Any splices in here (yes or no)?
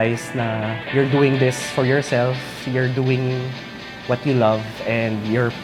no